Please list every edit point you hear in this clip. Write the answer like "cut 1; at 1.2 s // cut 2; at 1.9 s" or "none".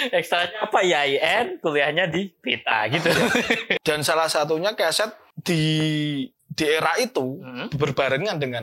cut 1; at 3.8 s // cut 2; at 5.3 s